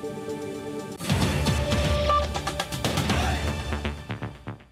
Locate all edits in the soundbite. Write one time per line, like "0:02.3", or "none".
0:00.9